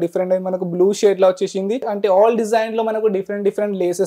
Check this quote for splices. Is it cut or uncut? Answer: cut